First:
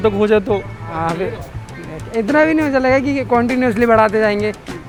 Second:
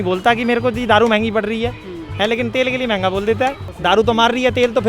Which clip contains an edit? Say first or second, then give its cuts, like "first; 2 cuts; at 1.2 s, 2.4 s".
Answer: second; 1 cut; at 3.7 s